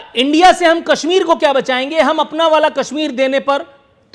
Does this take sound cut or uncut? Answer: uncut